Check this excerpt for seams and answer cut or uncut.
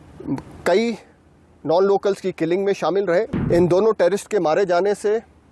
cut